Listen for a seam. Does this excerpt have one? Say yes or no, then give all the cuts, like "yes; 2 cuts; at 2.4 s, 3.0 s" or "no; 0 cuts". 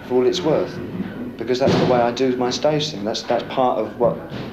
no; 0 cuts